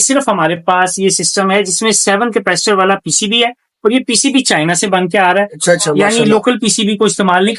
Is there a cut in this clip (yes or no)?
no